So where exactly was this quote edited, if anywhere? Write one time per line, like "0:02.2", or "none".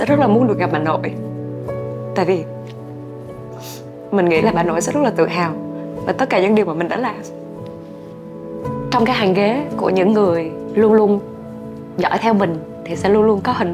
0:10.6